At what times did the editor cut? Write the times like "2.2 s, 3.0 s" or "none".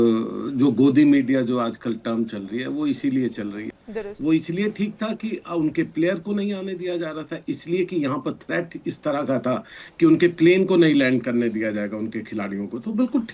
3.7 s